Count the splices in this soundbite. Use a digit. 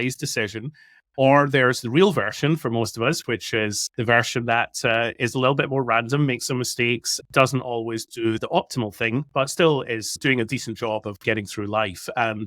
1